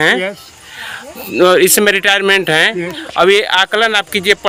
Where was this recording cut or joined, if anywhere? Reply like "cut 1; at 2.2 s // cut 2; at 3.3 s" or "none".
none